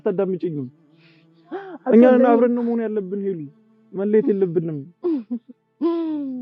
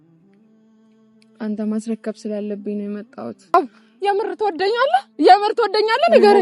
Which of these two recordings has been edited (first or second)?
second